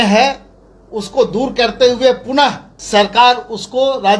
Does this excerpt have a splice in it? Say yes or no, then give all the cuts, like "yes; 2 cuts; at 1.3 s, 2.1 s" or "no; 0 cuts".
yes; 1 cut; at 2.7 s